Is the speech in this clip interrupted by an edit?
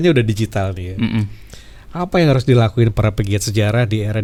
no; 0 cuts

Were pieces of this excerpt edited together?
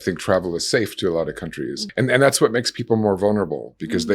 yes; 1 cut; at 1.8 s

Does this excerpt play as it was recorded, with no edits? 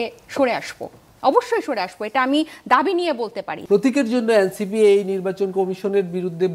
no; 1 cut; at 3.6 s

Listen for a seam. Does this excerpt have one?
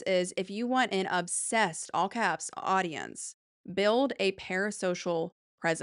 no; 0 cuts

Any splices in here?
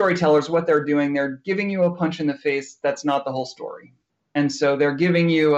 no; 0 cuts

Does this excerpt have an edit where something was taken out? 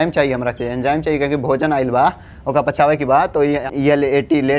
yes; 1 cut; at 3.6 s

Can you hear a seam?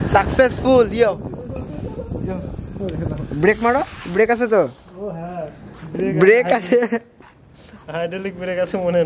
no; 0 cuts

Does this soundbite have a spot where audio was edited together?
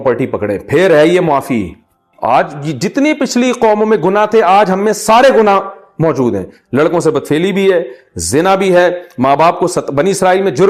yes; 1 cut; at 2.1 s

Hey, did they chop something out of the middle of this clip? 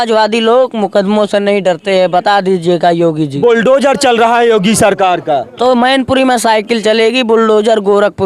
no; 0 cuts

